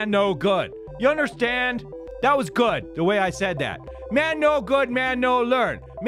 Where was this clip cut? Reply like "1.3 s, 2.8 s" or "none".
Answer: none